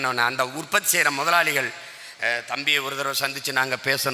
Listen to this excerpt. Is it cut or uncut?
uncut